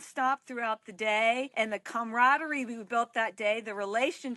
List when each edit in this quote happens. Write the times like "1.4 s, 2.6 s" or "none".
1.5 s